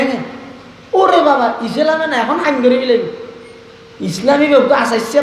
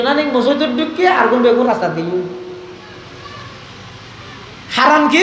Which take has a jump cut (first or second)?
second